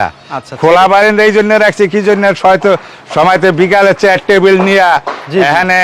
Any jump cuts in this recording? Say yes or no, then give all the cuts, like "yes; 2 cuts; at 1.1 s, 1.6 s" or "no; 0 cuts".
no; 0 cuts